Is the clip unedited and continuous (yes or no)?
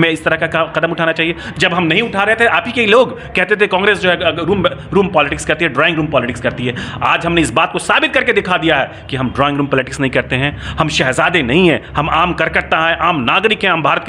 yes